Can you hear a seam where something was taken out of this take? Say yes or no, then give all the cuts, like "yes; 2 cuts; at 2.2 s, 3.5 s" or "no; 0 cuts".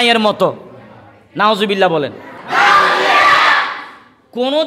yes; 1 cut; at 2.4 s